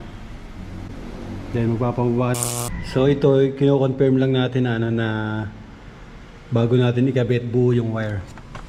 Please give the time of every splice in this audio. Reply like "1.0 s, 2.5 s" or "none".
2.3 s